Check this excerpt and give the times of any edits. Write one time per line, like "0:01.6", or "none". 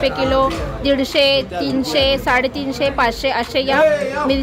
none